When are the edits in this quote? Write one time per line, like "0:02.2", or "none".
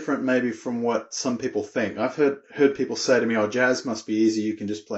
none